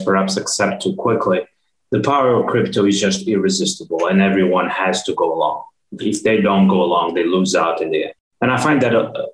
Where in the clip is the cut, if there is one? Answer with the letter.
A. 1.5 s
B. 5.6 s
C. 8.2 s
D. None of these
C